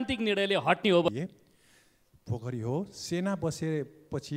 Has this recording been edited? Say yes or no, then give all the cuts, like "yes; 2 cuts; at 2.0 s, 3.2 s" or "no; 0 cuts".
yes; 1 cut; at 1.1 s